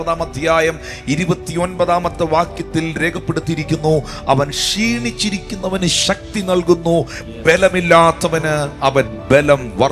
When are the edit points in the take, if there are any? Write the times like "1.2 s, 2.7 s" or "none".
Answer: none